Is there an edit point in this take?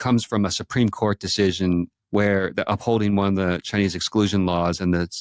yes; 1 cut; at 2.0 s

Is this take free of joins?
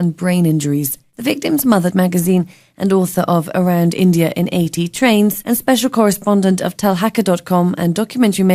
yes; 0 cuts

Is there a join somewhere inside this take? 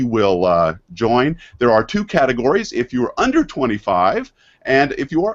no; 0 cuts

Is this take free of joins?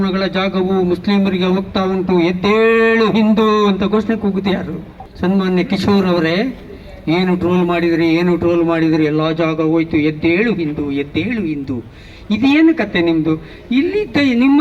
yes; 0 cuts

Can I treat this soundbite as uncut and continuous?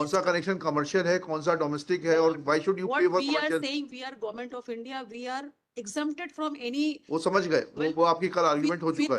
yes; 0 cuts

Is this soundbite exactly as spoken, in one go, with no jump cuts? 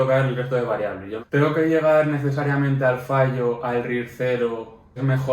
no; 1 cut; at 1.1 s

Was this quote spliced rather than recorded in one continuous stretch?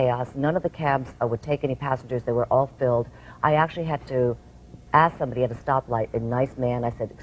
no; 0 cuts

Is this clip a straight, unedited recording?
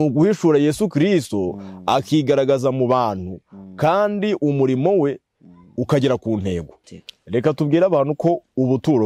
no; 1 cut; at 6.8 s

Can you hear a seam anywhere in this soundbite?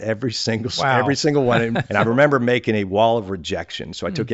yes; 1 cut; at 1.9 s

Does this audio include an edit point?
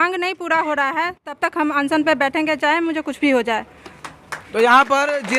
no; 0 cuts

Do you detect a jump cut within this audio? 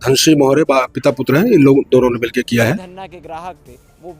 yes; 1 cut; at 2.8 s

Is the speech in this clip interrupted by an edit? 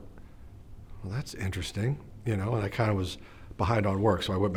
no; 0 cuts

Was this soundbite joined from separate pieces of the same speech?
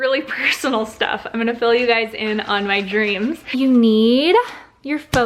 yes; 1 cut; at 3.5 s

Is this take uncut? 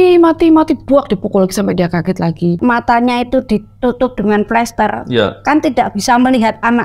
no; 1 cut; at 2.6 s

